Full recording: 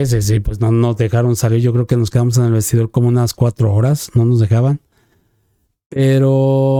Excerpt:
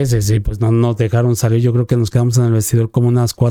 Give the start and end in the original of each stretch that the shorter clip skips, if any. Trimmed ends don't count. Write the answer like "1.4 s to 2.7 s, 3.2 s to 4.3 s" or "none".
none